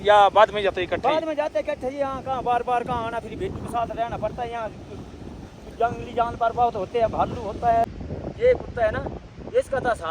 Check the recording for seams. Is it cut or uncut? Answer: cut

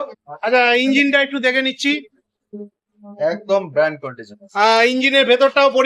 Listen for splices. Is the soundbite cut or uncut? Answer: uncut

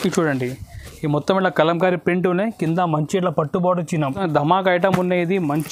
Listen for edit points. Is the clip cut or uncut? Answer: cut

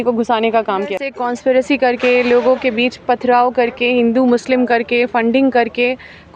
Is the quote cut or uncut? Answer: cut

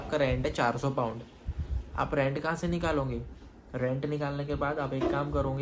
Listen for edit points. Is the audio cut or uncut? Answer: uncut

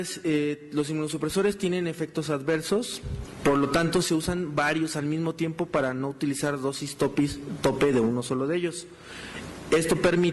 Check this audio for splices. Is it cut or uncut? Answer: uncut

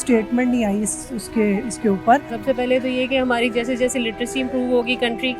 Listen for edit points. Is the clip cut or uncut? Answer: cut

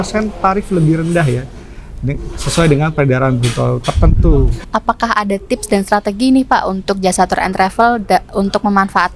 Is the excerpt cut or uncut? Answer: cut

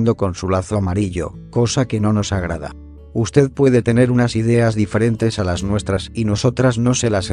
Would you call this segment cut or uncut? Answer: uncut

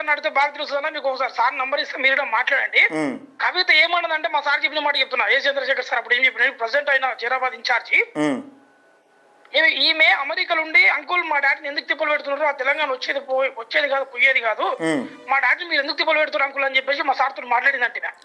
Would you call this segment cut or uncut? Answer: uncut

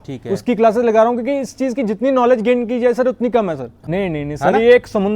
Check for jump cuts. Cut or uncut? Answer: cut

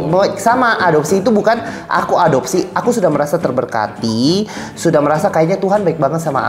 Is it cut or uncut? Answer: uncut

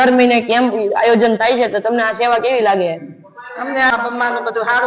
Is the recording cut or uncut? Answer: cut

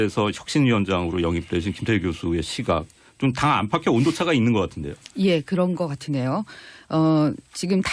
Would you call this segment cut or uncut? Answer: uncut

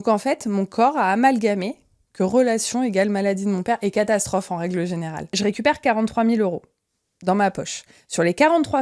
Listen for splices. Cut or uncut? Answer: cut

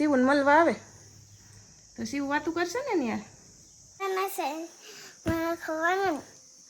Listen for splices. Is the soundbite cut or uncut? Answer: cut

